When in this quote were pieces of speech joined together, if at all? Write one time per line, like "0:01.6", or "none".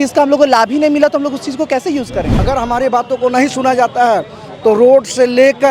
0:02.3